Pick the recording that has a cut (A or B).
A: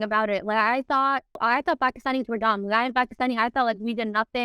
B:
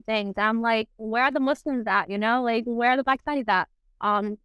A